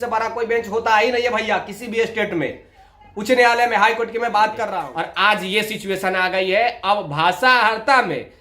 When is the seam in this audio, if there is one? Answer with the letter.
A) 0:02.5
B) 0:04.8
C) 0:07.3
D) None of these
B